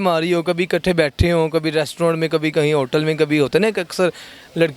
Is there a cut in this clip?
no; 0 cuts

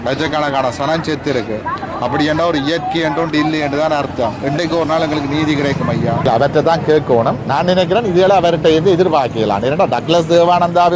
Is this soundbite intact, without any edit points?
no; 1 cut; at 6.3 s

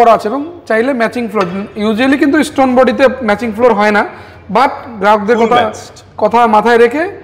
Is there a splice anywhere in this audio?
no; 0 cuts

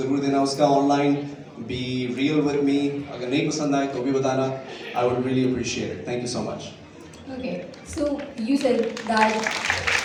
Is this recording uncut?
yes; 0 cuts

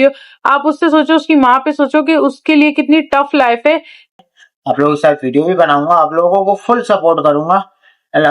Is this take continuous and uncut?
no; 1 cut; at 4.2 s

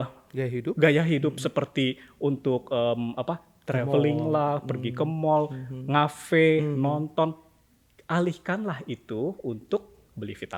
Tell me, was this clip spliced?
no; 0 cuts

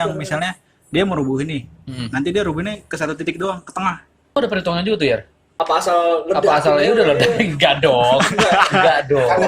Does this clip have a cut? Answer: yes; 2 cuts; at 4.4 s, 5.4 s

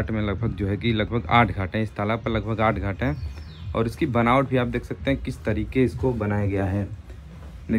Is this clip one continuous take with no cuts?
yes; 0 cuts

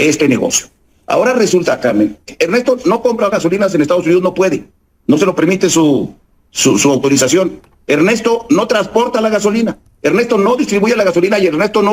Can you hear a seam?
no; 0 cuts

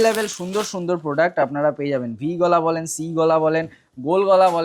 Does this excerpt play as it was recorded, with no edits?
yes; 0 cuts

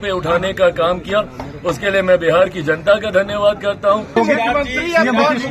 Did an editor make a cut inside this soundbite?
yes; 1 cut; at 4.2 s

